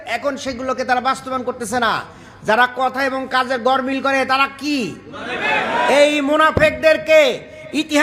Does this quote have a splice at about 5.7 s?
no; 0 cuts

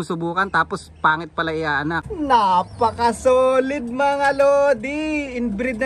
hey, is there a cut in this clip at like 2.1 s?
yes; 1 cut; at 2.1 s

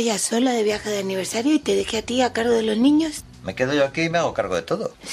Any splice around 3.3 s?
no; 0 cuts

